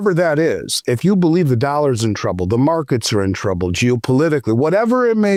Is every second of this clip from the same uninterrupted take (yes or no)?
yes